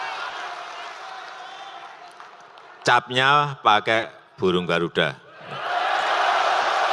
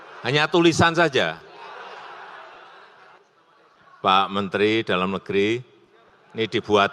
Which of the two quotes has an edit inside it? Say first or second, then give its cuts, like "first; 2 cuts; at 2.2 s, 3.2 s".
second; 1 cut; at 3.2 s